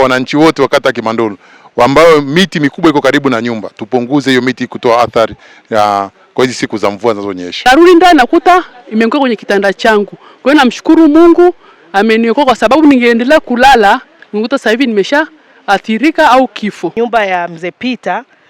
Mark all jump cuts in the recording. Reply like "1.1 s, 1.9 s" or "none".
7.5 s, 16.9 s

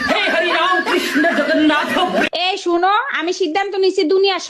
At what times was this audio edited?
2.3 s

